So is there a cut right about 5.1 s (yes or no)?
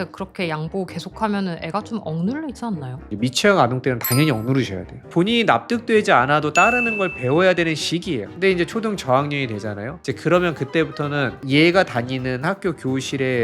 yes